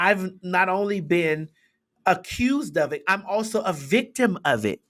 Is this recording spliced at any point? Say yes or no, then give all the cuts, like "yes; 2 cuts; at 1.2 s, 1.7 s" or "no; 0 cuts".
no; 0 cuts